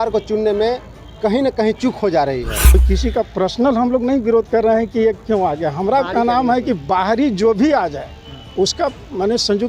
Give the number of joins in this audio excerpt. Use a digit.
1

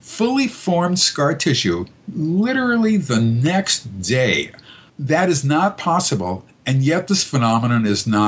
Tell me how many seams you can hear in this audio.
1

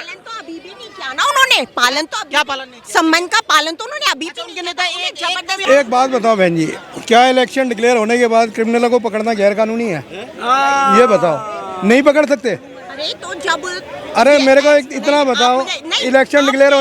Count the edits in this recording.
1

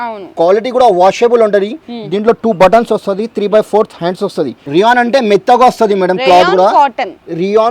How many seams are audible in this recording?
1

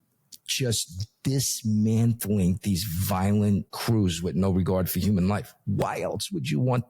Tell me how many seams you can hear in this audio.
1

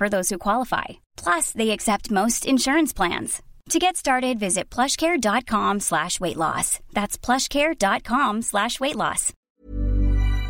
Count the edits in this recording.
1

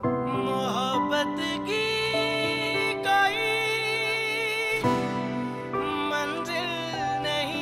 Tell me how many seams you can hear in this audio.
0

